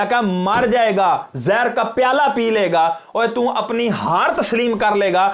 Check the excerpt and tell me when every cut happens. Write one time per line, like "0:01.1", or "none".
none

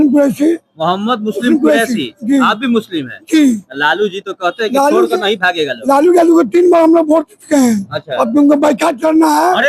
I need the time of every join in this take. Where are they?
none

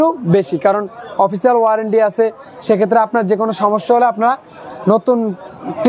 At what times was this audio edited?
none

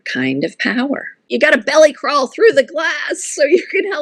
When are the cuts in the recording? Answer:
0:01.3

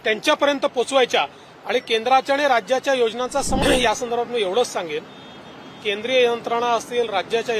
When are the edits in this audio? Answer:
0:03.6

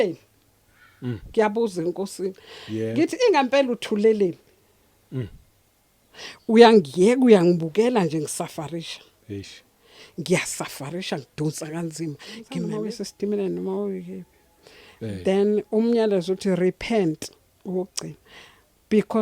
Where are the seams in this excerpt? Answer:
0:12.5

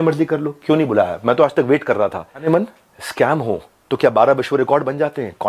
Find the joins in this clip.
0:02.4

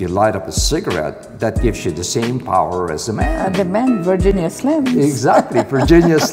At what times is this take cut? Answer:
none

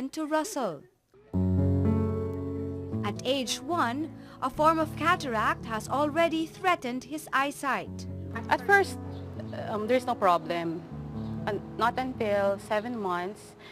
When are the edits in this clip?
0:02.5

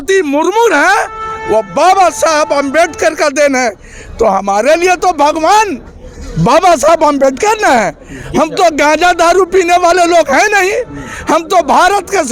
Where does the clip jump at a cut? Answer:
none

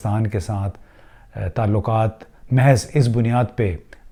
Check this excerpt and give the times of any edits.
none

